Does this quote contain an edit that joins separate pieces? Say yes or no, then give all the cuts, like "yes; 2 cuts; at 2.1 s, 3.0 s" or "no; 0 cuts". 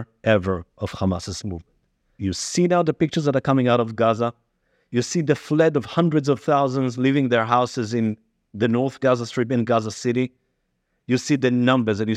yes; 1 cut; at 2.0 s